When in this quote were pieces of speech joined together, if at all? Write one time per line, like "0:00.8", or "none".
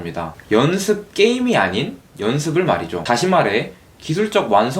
0:03.0